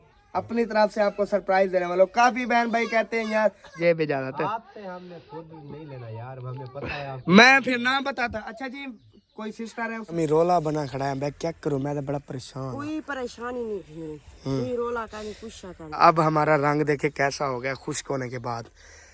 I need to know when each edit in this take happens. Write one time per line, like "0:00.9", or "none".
0:03.8
0:10.1
0:16.0

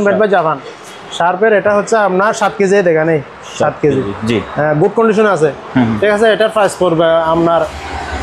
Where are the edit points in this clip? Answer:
none

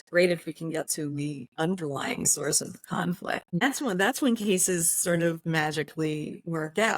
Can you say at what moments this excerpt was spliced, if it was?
0:03.6

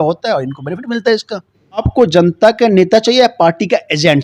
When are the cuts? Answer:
0:01.9

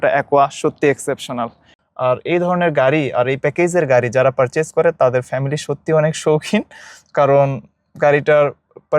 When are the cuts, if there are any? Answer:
0:01.8

